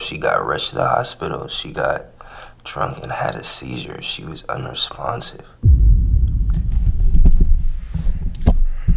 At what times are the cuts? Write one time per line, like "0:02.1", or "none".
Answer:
none